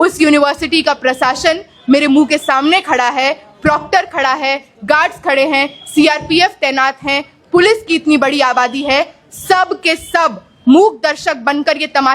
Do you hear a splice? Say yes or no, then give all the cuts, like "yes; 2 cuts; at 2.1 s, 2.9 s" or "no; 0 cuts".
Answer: no; 0 cuts